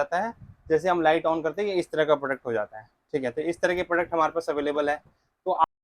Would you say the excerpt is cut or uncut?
uncut